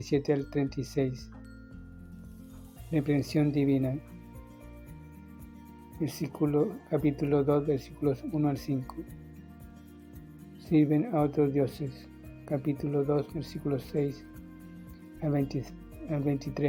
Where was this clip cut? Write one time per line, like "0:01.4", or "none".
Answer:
none